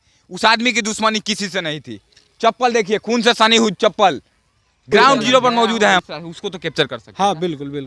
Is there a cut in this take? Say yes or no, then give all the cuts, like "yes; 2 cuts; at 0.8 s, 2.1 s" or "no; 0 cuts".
yes; 1 cut; at 6.0 s